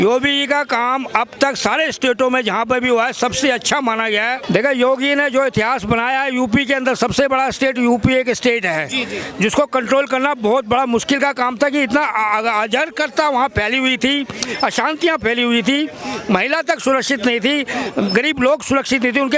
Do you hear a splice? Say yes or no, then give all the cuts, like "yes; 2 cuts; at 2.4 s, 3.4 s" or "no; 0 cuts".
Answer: yes; 1 cut; at 4.4 s